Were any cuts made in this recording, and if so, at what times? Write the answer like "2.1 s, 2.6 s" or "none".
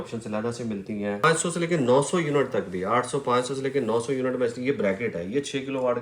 1.2 s